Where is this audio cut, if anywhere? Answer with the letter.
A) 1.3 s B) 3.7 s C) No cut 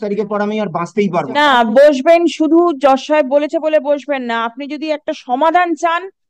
A